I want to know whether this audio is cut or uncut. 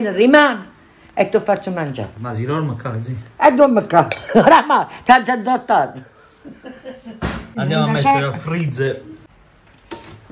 cut